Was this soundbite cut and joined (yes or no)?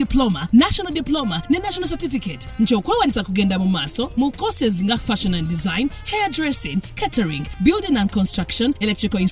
no